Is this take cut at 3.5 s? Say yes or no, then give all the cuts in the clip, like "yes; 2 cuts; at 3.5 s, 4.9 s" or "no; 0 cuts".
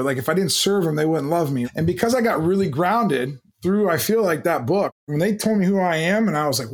no; 1 cut; at 5.0 s